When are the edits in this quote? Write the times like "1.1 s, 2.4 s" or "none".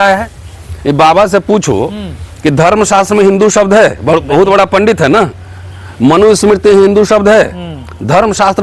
none